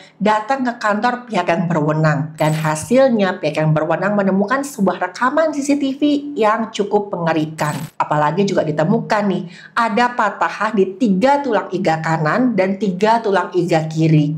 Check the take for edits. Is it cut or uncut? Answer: cut